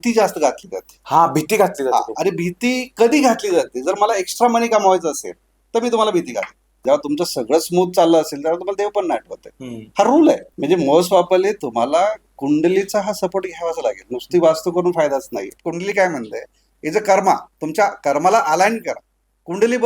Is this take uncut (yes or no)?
no